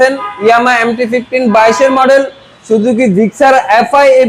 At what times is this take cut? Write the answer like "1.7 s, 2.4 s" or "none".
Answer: none